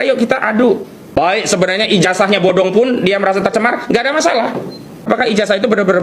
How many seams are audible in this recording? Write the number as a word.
two